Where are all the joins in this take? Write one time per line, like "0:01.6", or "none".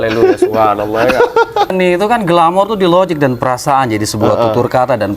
0:01.7